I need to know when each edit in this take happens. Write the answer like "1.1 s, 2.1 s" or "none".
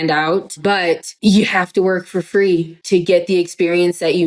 none